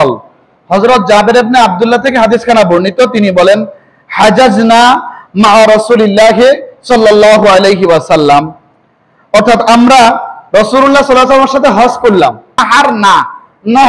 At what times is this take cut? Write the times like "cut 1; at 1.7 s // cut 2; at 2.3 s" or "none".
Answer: none

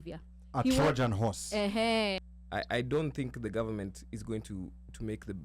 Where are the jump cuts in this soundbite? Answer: cut 1; at 2.2 s

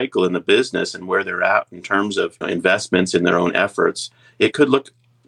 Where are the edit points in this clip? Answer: none

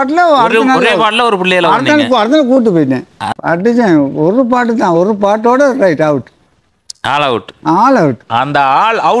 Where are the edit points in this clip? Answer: cut 1; at 3.2 s

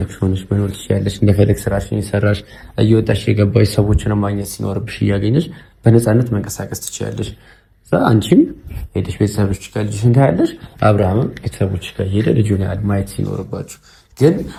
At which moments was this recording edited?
none

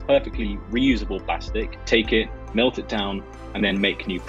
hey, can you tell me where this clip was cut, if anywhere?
cut 1; at 1.8 s

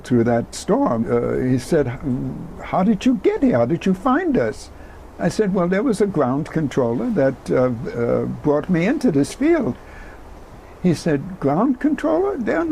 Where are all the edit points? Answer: cut 1; at 1.0 s

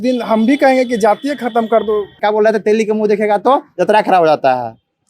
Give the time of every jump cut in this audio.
cut 1; at 2.1 s

